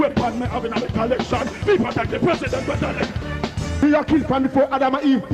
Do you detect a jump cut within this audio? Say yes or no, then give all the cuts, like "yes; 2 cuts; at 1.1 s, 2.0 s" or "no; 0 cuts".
yes; 1 cut; at 3.8 s